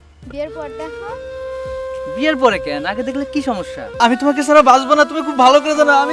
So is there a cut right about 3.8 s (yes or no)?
yes